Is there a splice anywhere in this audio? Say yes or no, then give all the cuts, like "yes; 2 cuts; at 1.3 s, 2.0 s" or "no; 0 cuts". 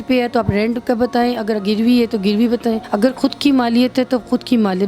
yes; 1 cut; at 2.9 s